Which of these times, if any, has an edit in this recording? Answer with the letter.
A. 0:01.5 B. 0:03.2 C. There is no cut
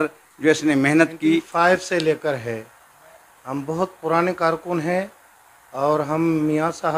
A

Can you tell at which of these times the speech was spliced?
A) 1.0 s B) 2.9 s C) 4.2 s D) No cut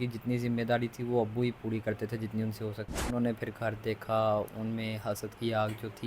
B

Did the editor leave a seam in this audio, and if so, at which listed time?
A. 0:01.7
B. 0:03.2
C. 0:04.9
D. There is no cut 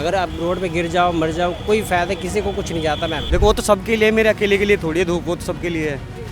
B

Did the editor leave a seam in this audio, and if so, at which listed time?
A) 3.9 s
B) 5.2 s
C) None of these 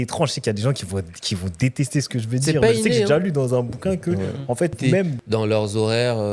B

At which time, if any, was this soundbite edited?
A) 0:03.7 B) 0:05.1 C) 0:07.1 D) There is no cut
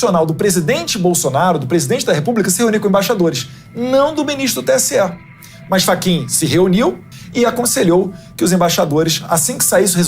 C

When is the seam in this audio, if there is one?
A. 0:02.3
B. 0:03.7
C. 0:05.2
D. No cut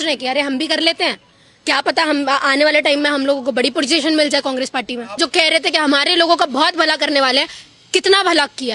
C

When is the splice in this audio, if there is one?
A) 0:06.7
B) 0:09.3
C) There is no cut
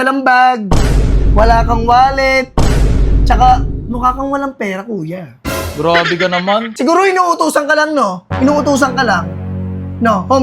A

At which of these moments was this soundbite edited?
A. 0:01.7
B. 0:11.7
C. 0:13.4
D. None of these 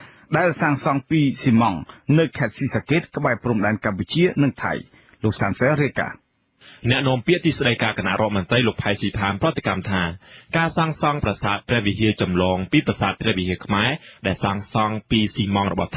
D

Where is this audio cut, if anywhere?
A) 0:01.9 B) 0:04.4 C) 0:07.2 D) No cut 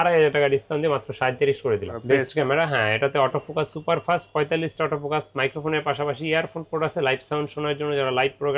A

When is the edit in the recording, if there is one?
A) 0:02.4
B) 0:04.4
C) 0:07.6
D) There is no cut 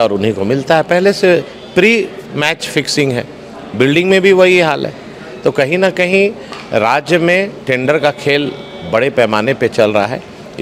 D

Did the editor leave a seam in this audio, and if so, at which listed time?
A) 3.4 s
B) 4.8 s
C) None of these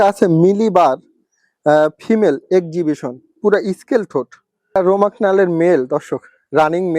B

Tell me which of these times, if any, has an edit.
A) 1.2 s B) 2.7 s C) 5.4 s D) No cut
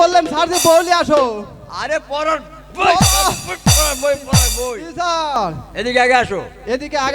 C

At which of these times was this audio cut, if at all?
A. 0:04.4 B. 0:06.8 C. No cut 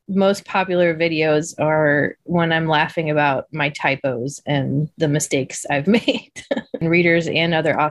B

